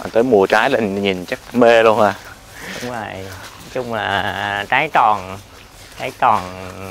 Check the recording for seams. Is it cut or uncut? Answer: uncut